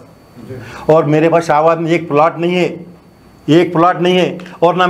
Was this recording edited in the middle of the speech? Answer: no; 0 cuts

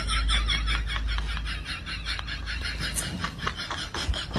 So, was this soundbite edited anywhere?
no; 0 cuts

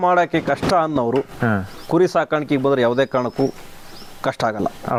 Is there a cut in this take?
no; 0 cuts

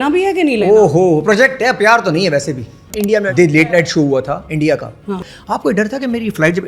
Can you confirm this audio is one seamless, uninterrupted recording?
no; 2 cuts; at 3.2 s, 5.1 s

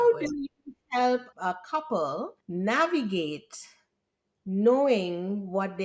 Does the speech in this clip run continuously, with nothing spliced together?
no; 2 cuts; at 1.4 s, 2.4 s

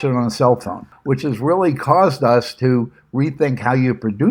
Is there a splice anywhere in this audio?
yes; 1 cut; at 0.9 s

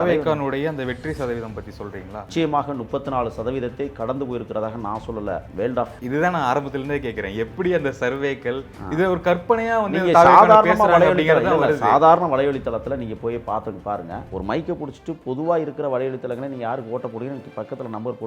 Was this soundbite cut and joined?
yes; 2 cuts; at 2.2 s, 5.7 s

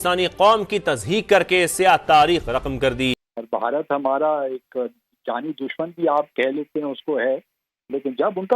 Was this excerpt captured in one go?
no; 1 cut; at 3.2 s

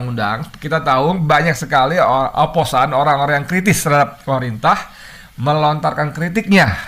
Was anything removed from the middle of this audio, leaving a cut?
no; 0 cuts

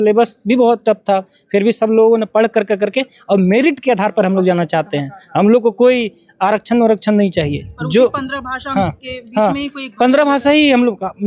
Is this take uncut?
yes; 0 cuts

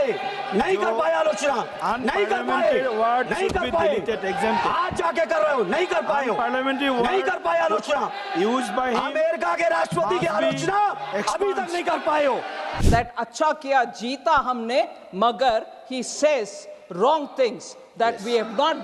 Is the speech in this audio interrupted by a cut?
yes; 1 cut; at 12.7 s

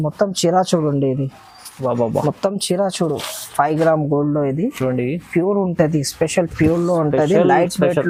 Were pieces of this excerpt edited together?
no; 0 cuts

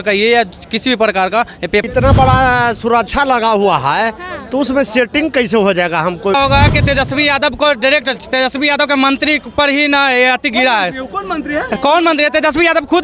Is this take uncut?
no; 2 cuts; at 1.8 s, 6.3 s

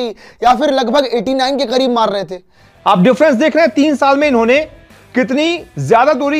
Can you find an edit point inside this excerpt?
yes; 1 cut; at 2.8 s

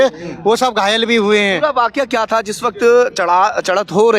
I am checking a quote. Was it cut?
no; 0 cuts

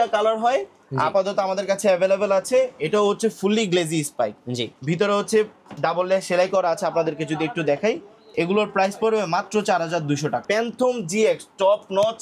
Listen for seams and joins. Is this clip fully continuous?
no; 1 cut; at 10.4 s

